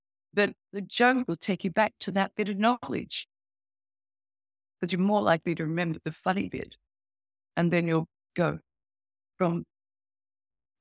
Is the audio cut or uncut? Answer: uncut